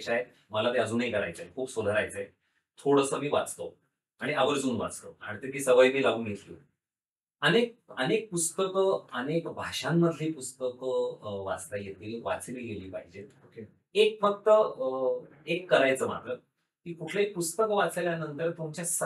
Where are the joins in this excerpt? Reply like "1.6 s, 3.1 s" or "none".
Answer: none